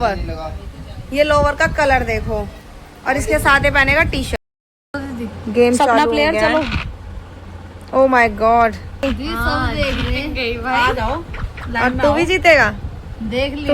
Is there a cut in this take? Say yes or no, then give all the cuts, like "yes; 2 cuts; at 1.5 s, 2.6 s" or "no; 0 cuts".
yes; 2 cuts; at 4.3 s, 9.0 s